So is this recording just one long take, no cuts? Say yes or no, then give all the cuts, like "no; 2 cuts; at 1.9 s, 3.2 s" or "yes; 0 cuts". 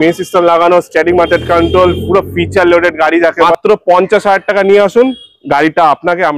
no; 1 cut; at 3.5 s